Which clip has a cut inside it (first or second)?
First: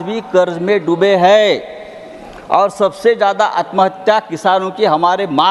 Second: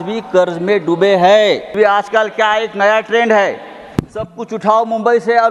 second